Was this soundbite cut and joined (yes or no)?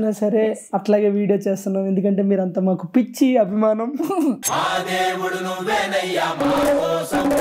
no